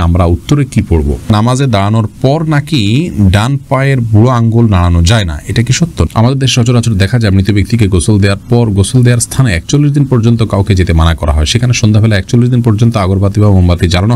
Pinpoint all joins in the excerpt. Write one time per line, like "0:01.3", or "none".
0:01.3
0:06.1